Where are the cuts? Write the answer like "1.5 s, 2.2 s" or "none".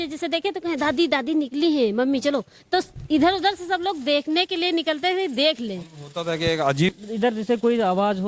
6.9 s